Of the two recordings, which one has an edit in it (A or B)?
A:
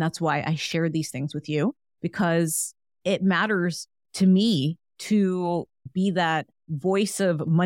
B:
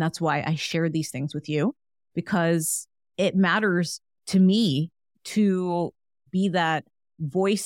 A